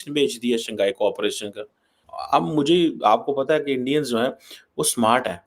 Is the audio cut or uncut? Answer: uncut